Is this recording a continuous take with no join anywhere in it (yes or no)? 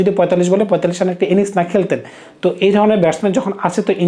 yes